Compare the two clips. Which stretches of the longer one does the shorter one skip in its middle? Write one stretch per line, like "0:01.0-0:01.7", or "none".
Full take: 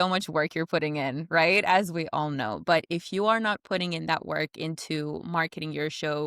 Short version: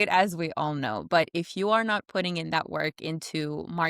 none